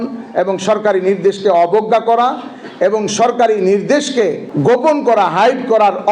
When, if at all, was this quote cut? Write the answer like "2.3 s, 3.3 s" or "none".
none